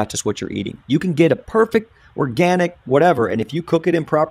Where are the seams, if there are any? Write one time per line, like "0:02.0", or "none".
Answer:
none